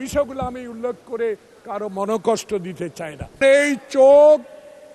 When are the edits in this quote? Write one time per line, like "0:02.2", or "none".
0:03.4